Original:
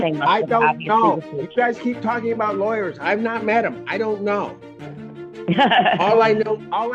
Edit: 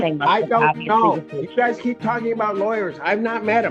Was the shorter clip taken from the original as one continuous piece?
yes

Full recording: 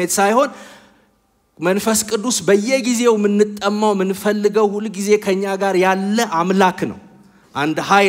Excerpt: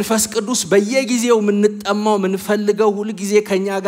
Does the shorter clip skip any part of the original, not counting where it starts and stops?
no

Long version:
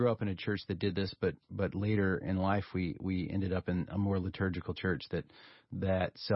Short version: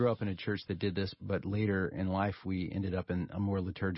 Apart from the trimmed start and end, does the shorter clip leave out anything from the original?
yes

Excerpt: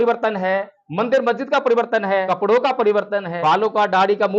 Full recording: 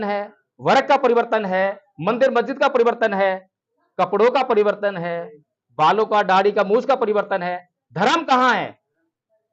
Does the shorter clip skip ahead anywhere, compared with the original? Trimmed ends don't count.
yes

